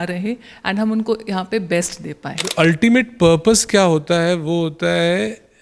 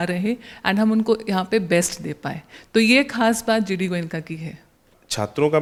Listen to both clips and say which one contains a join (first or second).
first